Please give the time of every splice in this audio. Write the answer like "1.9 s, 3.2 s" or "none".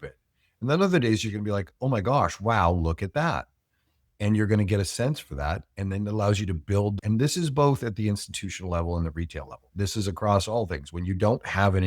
7.0 s

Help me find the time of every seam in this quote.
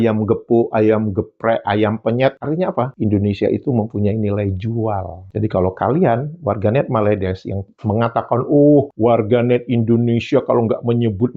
2.4 s, 5.2 s

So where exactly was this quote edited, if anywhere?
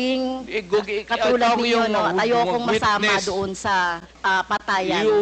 4.1 s

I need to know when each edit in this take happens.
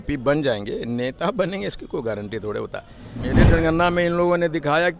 3.4 s

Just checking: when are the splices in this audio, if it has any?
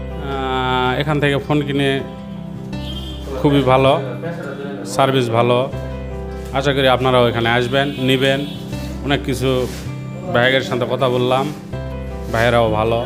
none

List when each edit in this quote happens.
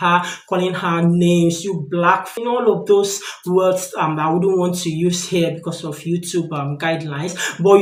none

